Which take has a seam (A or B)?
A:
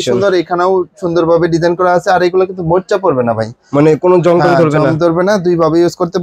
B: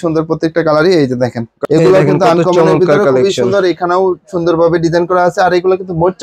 B